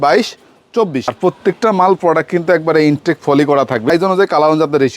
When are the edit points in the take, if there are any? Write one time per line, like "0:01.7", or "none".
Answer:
0:01.1
0:03.9